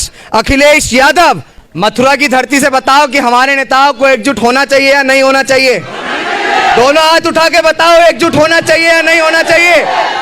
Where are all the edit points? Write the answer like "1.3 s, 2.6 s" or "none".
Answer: 1.5 s